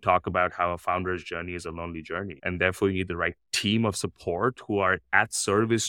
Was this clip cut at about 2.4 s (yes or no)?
yes